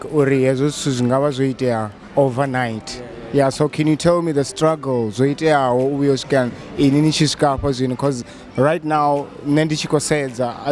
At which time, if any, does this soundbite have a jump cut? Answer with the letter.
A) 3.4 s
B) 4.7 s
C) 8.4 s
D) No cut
D